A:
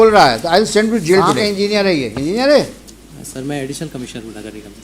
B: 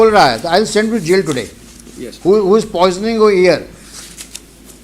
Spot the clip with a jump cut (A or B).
A